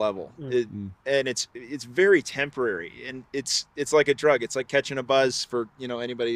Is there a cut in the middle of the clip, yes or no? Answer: no